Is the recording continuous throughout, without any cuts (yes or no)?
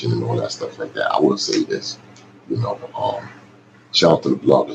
yes